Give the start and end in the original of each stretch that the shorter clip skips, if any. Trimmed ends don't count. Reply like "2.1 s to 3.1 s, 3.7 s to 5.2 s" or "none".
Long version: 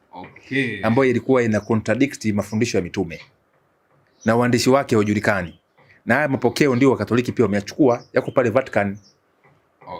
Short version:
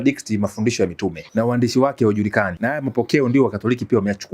3.2 s to 4.1 s, 5.5 s to 6.0 s